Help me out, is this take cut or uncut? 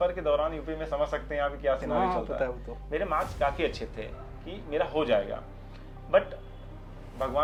uncut